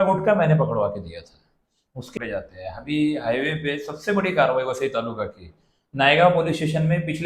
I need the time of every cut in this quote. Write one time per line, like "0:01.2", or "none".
0:02.1

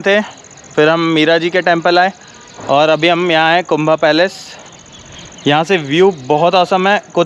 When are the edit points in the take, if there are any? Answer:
none

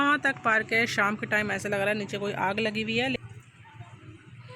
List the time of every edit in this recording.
0:03.2

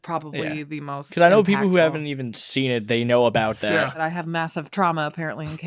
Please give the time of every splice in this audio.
0:04.0

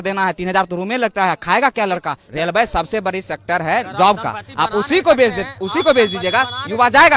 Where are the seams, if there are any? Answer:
0:02.2

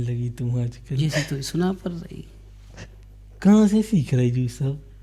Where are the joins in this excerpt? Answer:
none

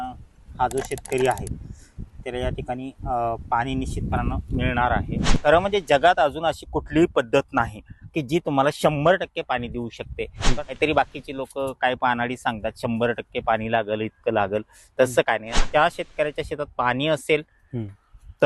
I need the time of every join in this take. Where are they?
0:05.4
0:10.4
0:15.6

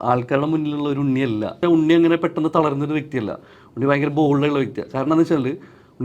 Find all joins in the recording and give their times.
0:01.6

